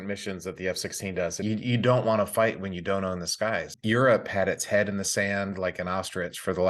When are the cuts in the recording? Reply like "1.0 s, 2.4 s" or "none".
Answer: 1.4 s, 3.7 s